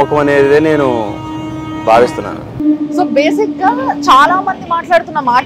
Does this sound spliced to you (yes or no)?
no